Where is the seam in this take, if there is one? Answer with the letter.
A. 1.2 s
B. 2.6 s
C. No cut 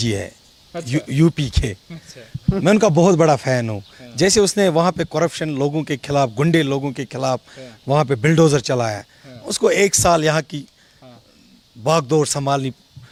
C